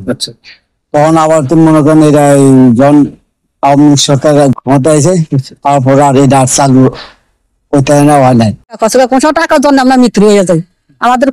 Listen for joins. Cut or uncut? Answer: cut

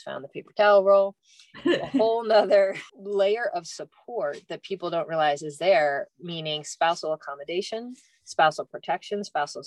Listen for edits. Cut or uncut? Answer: uncut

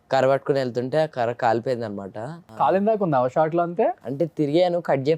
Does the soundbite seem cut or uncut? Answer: cut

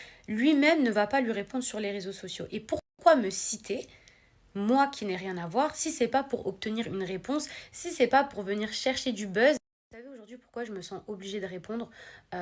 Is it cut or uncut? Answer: uncut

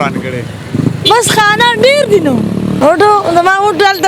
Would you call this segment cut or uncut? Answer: cut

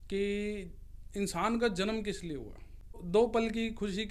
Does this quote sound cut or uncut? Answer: cut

